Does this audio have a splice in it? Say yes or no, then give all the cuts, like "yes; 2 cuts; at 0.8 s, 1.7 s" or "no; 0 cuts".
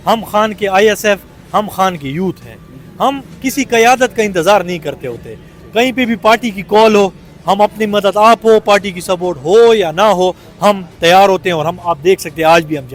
no; 0 cuts